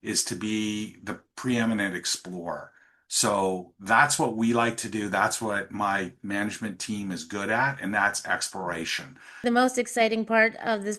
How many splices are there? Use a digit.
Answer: 1